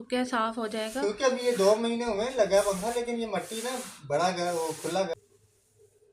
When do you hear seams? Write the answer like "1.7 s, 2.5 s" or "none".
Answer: 5.1 s